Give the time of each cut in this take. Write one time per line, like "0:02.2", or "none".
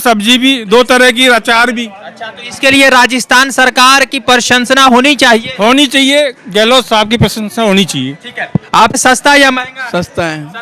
0:09.0